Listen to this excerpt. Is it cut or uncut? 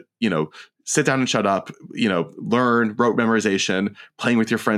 uncut